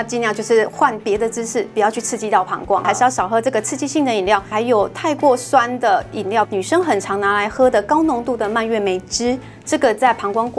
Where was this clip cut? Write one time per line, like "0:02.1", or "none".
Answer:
0:02.8
0:04.5
0:06.5